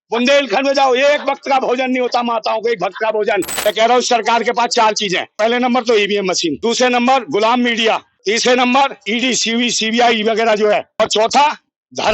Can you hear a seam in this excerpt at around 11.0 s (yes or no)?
yes